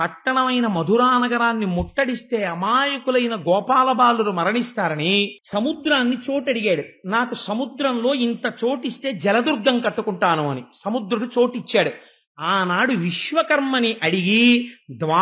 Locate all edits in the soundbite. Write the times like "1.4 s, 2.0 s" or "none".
5.4 s